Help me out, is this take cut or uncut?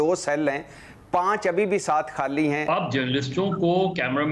cut